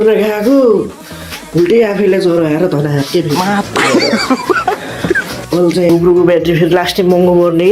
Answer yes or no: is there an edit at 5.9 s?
yes